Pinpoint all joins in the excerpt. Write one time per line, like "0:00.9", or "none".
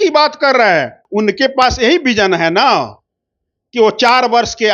0:01.0